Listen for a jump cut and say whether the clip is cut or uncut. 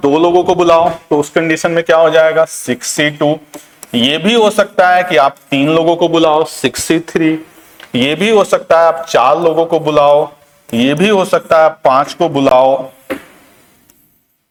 uncut